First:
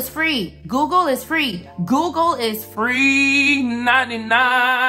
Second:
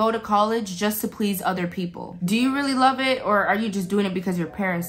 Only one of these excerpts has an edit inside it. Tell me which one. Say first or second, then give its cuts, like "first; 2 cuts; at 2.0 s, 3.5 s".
second; 1 cut; at 2.1 s